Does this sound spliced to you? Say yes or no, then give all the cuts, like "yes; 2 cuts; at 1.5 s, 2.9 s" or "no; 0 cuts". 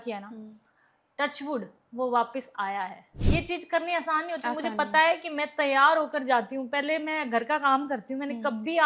yes; 1 cut; at 3.1 s